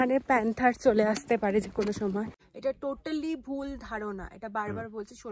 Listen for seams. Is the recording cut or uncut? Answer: cut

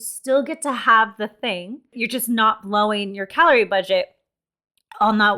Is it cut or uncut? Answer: cut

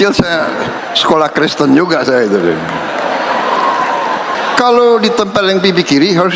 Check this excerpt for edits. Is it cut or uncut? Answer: cut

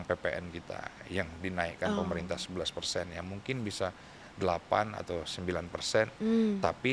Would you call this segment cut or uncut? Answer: uncut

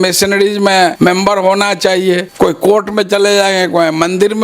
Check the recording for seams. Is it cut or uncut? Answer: cut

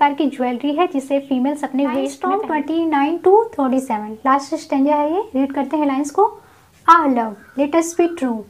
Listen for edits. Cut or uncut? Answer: cut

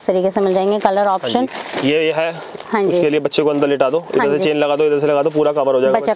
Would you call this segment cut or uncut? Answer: uncut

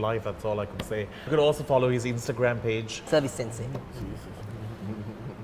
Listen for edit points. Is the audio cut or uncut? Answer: cut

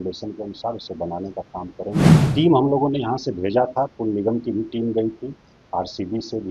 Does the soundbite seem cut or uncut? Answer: cut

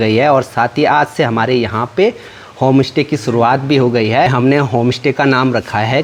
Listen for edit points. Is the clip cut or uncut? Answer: uncut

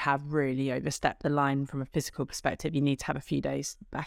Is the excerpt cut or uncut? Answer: uncut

